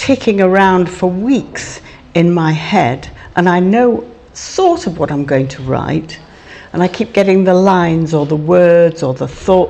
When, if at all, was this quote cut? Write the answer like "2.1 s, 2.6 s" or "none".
none